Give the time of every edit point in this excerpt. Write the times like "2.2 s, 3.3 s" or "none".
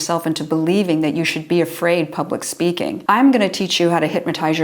3.0 s